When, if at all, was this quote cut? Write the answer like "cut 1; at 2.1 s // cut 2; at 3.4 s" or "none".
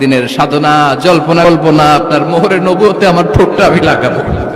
cut 1; at 1.4 s